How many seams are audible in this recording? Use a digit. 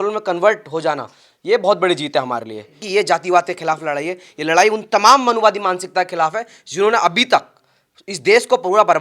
1